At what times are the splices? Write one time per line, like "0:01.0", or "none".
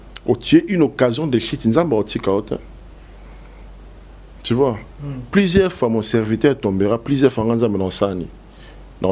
none